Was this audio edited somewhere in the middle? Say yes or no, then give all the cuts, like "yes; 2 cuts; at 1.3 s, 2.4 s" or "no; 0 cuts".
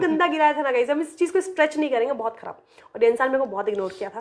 no; 0 cuts